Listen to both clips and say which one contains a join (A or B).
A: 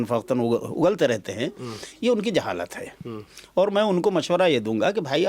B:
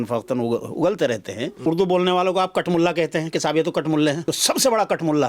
B